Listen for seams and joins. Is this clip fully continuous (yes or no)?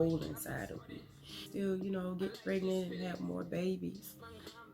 no